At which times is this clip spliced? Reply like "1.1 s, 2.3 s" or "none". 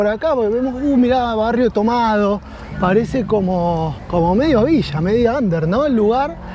4.0 s